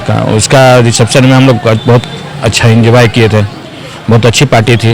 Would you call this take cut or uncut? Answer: uncut